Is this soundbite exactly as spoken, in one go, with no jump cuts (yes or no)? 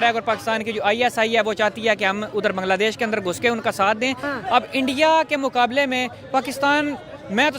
no